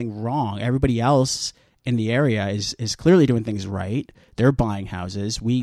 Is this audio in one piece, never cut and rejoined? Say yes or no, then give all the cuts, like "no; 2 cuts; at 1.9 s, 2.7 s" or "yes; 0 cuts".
yes; 0 cuts